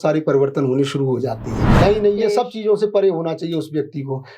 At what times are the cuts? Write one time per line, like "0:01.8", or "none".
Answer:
0:01.7